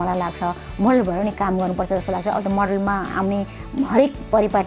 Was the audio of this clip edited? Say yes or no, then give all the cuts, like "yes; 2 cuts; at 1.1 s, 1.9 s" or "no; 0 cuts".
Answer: no; 0 cuts